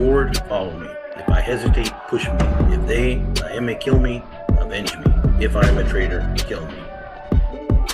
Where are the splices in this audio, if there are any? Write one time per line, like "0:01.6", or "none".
0:06.9